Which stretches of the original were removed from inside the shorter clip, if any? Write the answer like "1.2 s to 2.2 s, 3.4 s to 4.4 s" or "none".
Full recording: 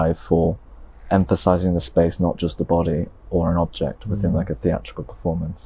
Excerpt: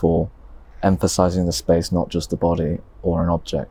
none